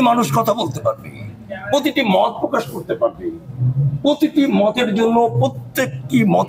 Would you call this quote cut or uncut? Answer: uncut